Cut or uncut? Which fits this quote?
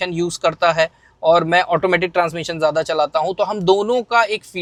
uncut